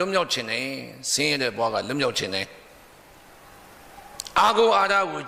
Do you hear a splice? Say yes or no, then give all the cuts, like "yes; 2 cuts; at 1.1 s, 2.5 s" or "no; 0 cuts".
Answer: no; 0 cuts